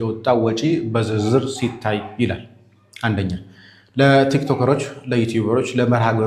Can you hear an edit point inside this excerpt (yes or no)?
no